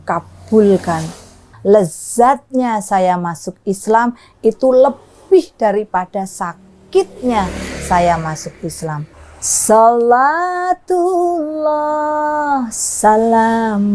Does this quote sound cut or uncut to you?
cut